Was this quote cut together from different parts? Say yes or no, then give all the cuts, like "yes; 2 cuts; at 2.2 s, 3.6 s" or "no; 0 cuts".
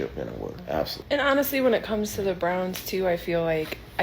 yes; 1 cut; at 1.0 s